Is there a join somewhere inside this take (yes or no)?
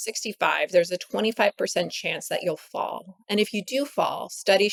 no